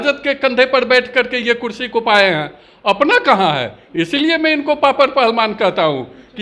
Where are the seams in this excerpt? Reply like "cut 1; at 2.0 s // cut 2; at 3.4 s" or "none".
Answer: none